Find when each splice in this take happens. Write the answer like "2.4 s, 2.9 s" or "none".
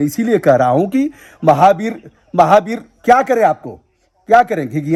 none